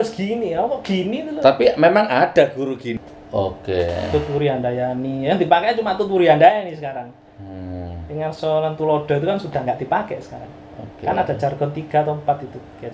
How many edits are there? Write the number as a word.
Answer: one